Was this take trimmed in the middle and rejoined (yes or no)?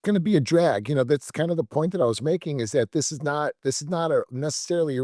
no